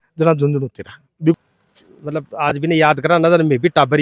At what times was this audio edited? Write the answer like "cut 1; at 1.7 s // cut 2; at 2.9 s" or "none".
cut 1; at 1.3 s

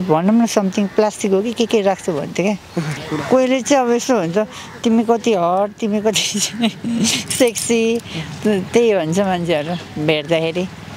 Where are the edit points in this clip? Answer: cut 1; at 3.0 s

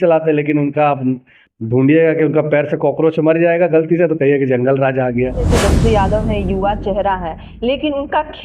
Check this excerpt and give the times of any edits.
cut 1; at 5.5 s

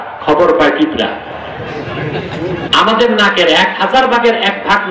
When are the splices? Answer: cut 1; at 2.6 s

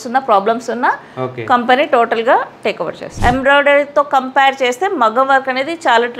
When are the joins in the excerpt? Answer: cut 1; at 3.0 s

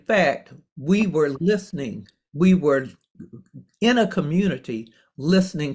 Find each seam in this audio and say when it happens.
none

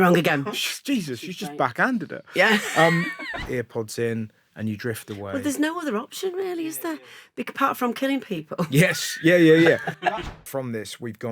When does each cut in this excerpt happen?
cut 1; at 3.4 s // cut 2; at 9.9 s

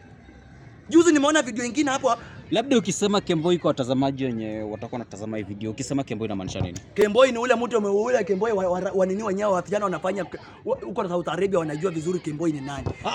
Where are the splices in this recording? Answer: none

